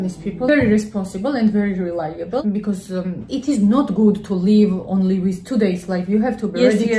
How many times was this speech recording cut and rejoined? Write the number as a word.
one